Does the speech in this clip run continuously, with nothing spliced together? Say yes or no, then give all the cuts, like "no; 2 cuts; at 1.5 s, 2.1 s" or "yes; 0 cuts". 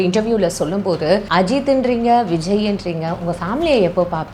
no; 1 cut; at 1.3 s